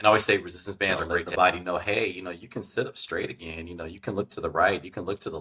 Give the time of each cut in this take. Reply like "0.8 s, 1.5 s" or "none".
1.1 s